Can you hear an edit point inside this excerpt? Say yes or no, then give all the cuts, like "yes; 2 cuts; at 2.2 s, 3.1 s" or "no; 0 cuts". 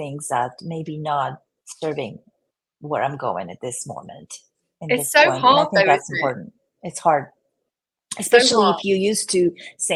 no; 0 cuts